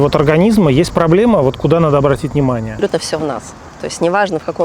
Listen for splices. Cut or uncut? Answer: cut